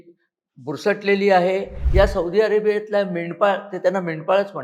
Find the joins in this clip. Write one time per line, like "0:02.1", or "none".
0:01.8